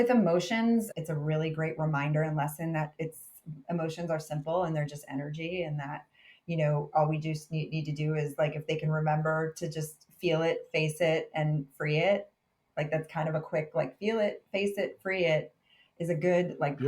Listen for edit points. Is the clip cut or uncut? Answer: cut